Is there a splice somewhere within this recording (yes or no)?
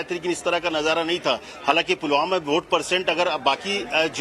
no